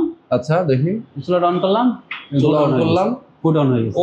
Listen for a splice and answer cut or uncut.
uncut